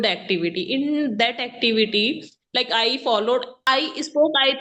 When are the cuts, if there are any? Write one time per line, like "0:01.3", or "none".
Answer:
0:03.5